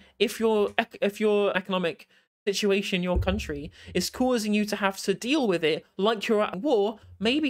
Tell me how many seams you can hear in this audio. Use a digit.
2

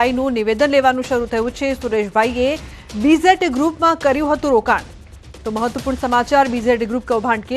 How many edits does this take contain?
1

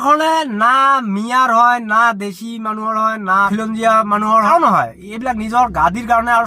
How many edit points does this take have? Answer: 1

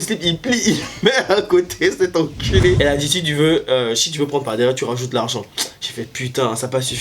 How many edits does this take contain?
1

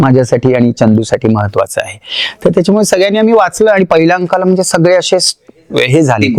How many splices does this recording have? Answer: 0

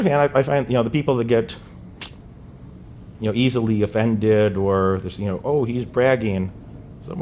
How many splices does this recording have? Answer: 0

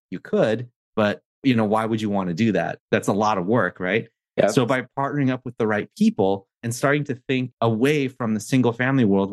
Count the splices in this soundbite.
5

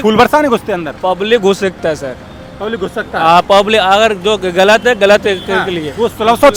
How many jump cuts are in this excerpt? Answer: 0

